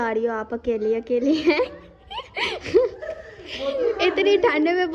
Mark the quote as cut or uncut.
uncut